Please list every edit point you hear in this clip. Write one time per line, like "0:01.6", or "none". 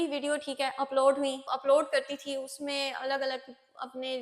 0:01.5